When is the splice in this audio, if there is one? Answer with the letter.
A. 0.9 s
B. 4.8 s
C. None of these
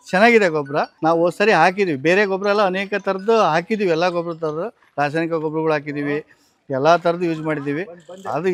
C